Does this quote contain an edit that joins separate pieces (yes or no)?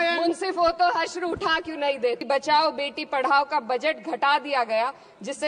yes